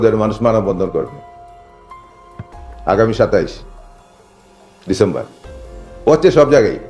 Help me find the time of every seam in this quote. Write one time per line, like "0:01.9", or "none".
none